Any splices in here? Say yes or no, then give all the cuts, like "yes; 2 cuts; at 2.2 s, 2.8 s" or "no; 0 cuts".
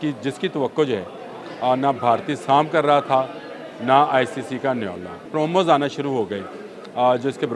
yes; 1 cut; at 5.2 s